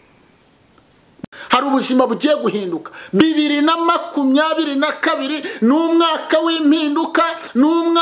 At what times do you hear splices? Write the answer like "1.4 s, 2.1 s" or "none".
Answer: 1.3 s